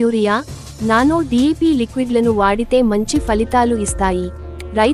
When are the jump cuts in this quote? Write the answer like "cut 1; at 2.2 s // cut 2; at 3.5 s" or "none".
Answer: none